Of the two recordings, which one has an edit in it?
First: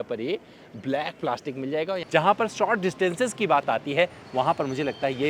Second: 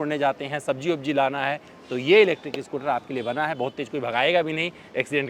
first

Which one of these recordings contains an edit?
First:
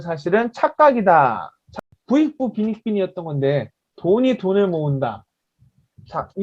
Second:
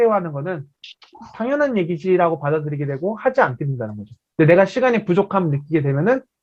first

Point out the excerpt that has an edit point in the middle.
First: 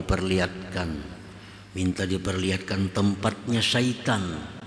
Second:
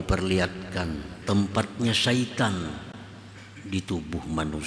second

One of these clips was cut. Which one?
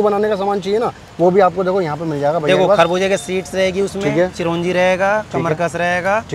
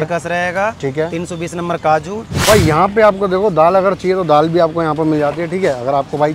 second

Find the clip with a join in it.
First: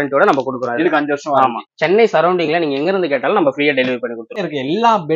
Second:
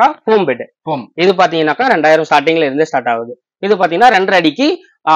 first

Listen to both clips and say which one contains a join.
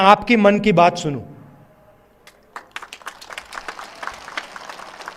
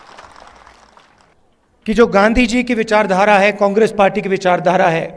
second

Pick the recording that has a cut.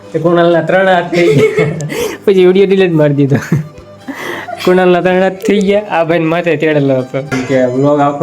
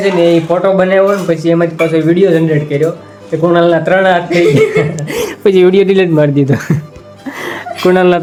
first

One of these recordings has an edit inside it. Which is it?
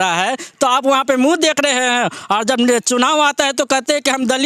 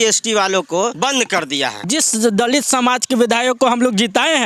second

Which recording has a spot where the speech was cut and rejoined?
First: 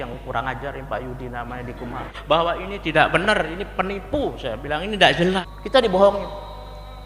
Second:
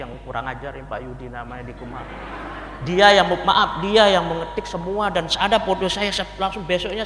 first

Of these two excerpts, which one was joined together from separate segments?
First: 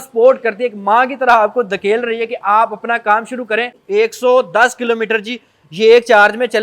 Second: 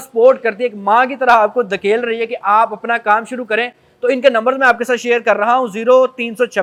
first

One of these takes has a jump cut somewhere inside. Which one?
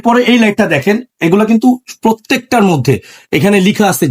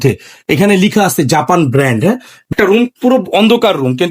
second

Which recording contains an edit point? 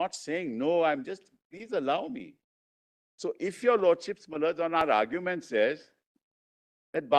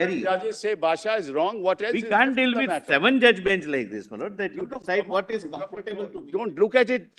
second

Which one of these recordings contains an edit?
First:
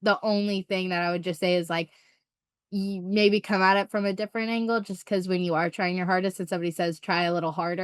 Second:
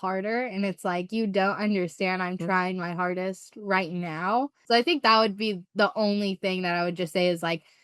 second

